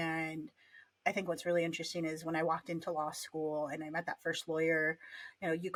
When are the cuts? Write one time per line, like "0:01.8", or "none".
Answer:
none